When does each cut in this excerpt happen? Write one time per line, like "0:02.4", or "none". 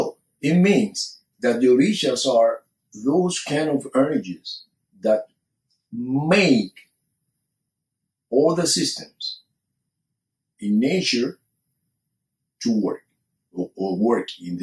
none